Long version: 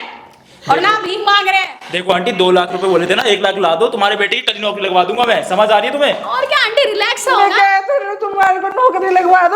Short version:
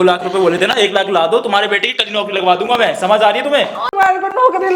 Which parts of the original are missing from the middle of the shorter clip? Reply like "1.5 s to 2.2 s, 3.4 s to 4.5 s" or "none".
6.3 s to 8.2 s

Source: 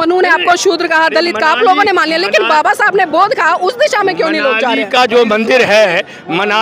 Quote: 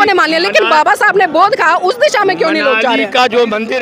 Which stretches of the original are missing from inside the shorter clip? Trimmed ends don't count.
none

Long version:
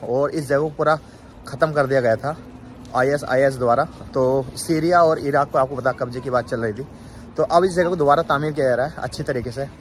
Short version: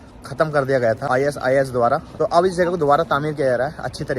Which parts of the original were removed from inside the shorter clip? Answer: 2.2 s to 2.9 s, 3.9 s to 7.3 s

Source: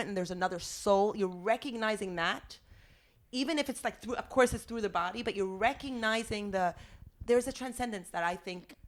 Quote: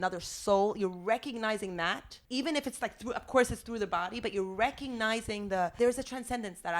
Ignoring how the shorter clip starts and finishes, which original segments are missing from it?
2.5 s to 3.1 s, 6.7 s to 7.2 s

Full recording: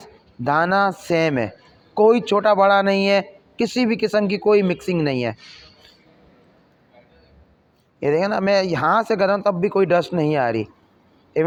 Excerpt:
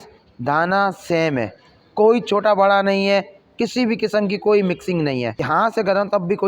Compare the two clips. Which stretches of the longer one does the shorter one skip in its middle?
5.4 s to 8.7 s

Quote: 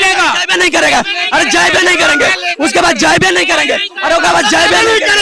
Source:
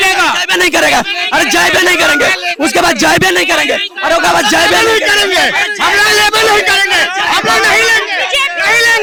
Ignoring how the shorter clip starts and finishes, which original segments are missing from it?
none

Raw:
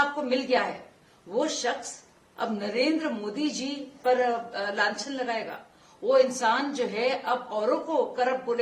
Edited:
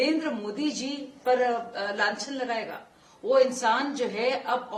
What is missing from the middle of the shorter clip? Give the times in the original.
none

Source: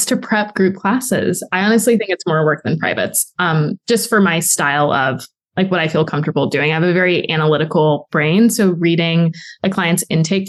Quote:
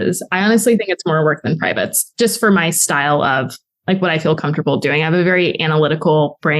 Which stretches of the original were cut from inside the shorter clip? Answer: 3.3 s to 3.8 s

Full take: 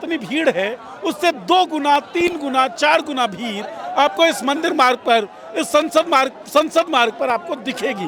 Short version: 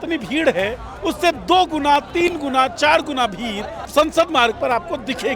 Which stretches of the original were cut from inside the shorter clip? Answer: 3.8 s to 6.4 s

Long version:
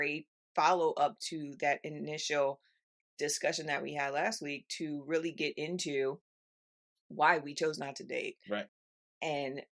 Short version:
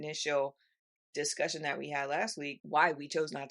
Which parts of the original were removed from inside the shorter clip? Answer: 4.5 s to 7.0 s

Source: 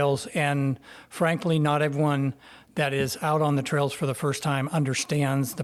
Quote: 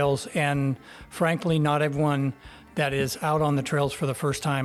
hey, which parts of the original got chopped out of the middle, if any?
none

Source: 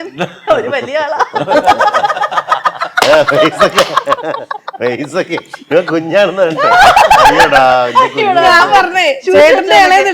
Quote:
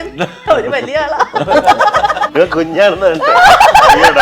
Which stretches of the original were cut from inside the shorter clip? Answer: 2.2 s to 5.6 s

